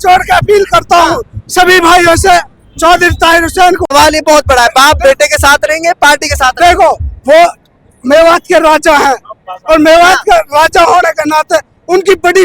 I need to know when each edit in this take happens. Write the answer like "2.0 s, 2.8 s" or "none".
3.8 s